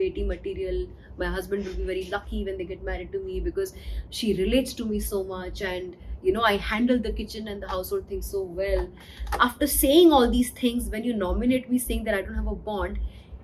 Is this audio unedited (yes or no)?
yes